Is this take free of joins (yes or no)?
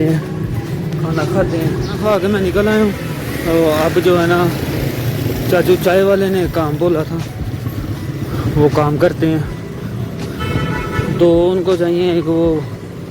no